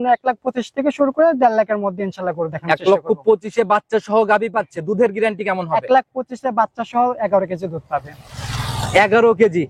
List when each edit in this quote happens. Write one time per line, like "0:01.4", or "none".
none